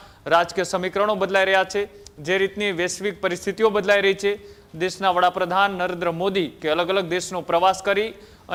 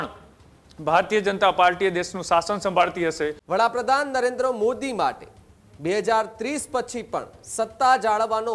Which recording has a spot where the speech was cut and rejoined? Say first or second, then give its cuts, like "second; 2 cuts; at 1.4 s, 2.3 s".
second; 1 cut; at 3.4 s